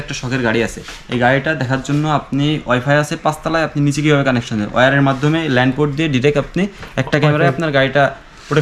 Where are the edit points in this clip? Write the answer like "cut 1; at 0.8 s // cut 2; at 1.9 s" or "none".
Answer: none